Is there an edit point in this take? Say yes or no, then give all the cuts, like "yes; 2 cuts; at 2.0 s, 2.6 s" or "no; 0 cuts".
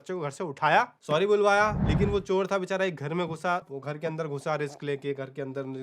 yes; 2 cuts; at 1.8 s, 3.7 s